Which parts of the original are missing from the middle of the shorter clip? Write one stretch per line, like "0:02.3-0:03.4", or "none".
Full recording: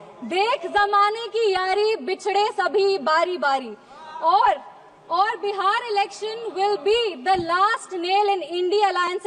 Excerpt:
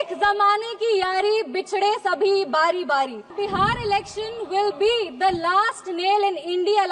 0:03.8-0:05.4